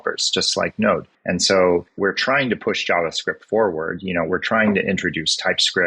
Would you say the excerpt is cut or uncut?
cut